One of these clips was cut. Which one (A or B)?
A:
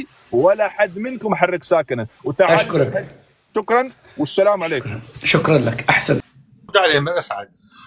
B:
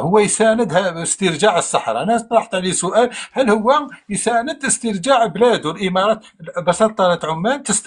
A